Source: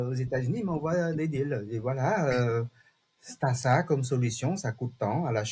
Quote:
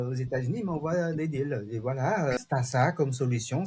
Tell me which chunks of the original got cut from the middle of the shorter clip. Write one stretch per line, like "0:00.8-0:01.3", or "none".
0:02.4-0:03.3